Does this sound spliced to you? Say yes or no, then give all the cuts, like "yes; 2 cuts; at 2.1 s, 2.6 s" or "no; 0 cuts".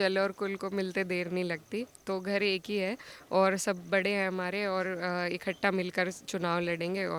no; 0 cuts